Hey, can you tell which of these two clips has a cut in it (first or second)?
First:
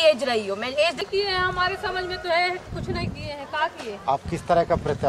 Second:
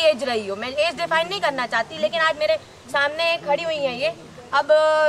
first